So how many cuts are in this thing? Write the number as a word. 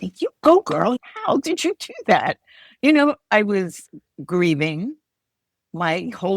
one